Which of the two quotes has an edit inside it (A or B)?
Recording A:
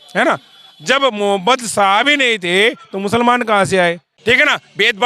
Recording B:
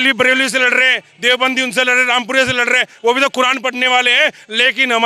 A